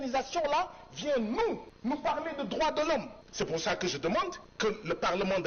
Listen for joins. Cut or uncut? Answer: cut